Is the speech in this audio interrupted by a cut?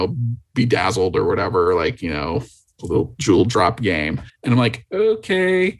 yes; 1 cut; at 4.3 s

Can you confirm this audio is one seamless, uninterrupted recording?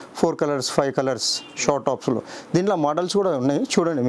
yes; 0 cuts

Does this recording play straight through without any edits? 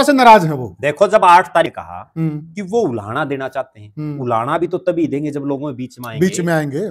no; 1 cut; at 1.7 s

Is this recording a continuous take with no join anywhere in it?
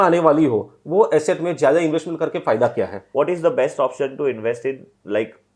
no; 1 cut; at 3.0 s

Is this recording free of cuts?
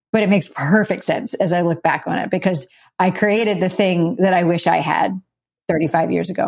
no; 1 cut; at 5.5 s

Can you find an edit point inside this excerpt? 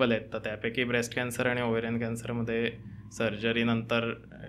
no; 0 cuts

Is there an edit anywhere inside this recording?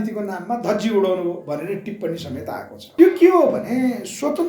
yes; 1 cut; at 2.8 s

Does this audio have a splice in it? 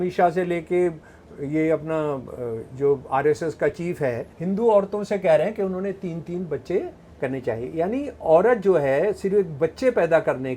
yes; 1 cut; at 4.3 s

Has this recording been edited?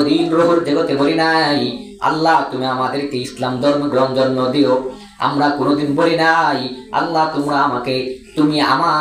no; 0 cuts

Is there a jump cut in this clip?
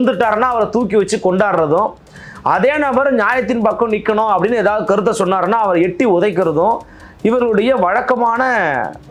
no; 0 cuts

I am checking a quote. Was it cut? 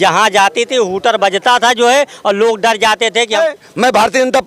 yes; 1 cut; at 3.4 s

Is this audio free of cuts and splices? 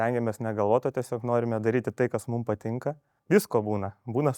no; 1 cut; at 3.1 s

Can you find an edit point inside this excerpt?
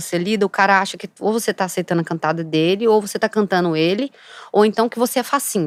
no; 0 cuts

